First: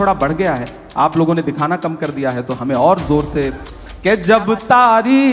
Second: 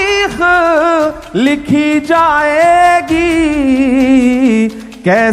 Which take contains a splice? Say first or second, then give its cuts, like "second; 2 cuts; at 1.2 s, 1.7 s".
first; 1 cut; at 3.7 s